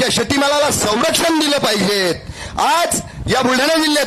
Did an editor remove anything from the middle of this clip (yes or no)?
no